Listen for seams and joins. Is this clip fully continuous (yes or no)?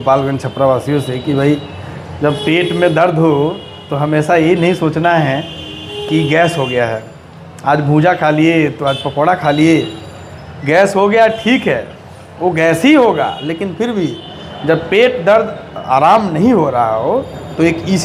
yes